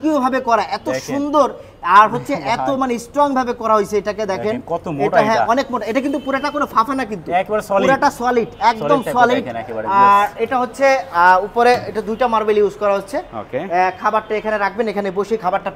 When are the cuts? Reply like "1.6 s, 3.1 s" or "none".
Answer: none